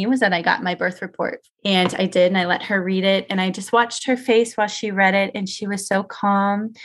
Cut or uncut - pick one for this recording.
cut